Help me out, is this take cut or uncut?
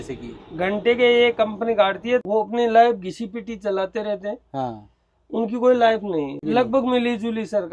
cut